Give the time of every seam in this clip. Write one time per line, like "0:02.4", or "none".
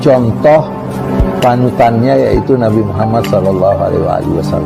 none